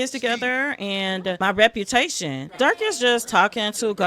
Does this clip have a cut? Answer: yes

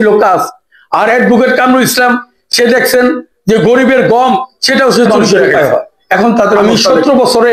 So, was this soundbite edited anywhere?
yes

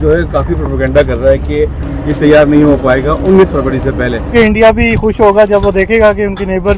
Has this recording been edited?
yes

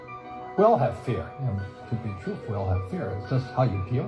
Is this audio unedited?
yes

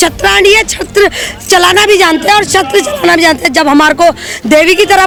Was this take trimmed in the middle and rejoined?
no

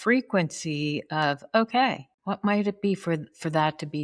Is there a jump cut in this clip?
yes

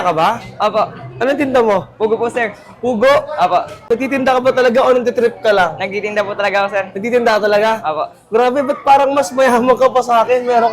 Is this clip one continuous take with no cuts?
yes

